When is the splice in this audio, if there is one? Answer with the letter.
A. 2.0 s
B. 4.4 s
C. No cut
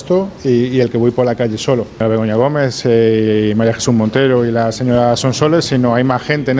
A